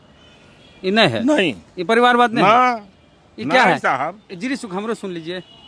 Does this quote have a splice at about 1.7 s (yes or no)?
no